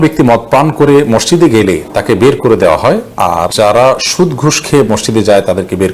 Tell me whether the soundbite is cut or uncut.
cut